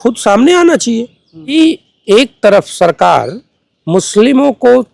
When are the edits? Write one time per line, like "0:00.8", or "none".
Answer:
0:01.5